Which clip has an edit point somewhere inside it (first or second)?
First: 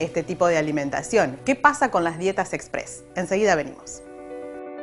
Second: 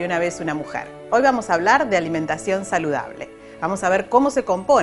first